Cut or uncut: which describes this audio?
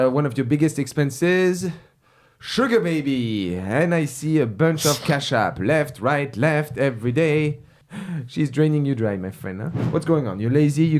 cut